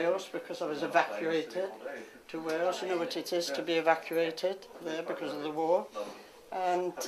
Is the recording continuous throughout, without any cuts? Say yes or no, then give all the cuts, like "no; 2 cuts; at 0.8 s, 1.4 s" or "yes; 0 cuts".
yes; 0 cuts